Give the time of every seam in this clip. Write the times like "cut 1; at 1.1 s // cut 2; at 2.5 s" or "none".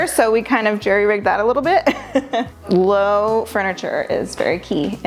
none

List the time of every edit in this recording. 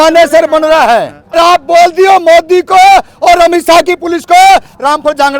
cut 1; at 1.3 s

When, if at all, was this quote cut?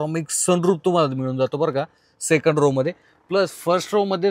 none

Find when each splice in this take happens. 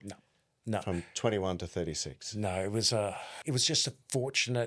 cut 1; at 3.3 s

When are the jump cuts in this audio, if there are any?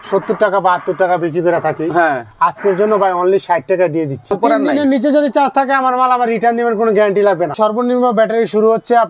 cut 1; at 4.3 s // cut 2; at 7.5 s

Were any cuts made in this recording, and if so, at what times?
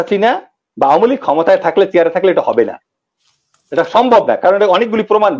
none

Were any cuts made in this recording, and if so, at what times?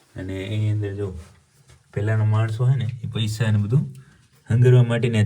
none

